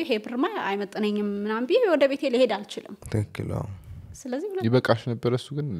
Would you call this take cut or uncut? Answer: uncut